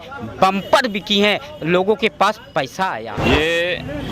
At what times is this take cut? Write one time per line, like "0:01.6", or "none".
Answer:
0:03.2